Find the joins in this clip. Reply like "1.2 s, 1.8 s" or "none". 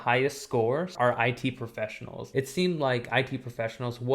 0.9 s, 2.2 s